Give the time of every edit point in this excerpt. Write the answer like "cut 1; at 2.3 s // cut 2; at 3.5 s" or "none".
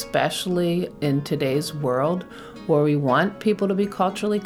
cut 1; at 0.9 s